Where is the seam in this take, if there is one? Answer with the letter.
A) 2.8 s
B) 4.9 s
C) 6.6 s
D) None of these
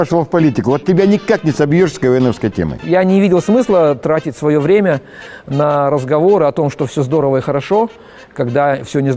A